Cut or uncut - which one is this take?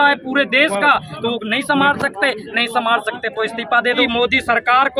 cut